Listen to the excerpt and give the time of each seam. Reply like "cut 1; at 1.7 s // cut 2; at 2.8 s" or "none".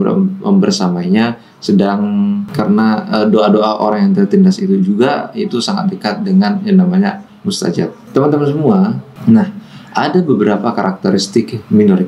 none